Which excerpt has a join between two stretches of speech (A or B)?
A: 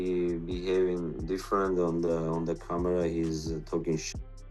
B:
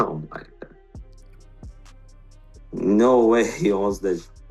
B